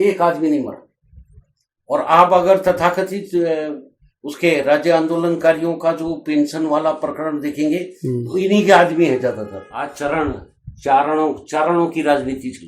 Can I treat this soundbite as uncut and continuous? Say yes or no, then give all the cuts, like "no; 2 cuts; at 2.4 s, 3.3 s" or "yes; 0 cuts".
no; 1 cut; at 9.7 s